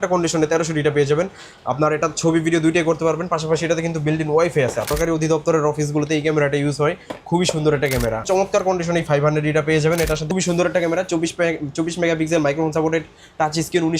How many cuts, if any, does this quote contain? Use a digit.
3